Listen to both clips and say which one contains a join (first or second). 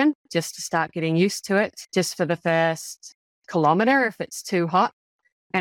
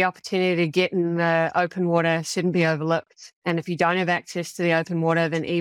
first